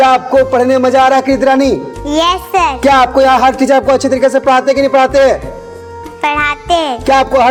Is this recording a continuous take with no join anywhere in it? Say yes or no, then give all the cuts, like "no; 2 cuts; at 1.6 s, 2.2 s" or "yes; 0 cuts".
yes; 0 cuts